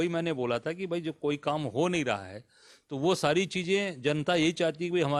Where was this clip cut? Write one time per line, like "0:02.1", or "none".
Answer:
none

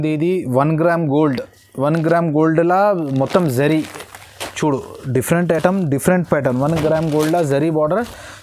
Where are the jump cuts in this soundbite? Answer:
none

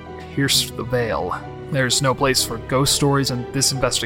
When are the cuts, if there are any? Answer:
0:01.5
0:03.3

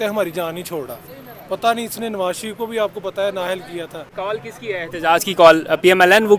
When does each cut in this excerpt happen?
0:04.0

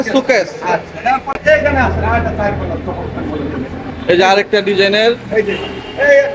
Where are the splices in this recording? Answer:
none

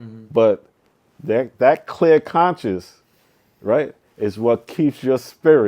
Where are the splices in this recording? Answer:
none

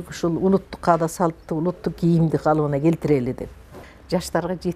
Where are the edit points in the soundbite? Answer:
0:03.6

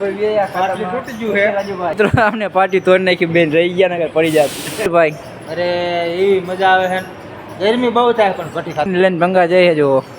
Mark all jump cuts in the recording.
0:01.9
0:04.9
0:08.9

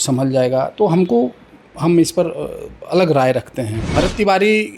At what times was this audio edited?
0:03.8

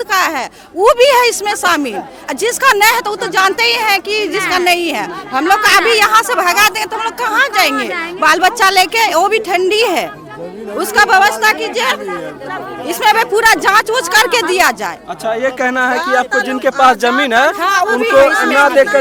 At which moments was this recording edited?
none

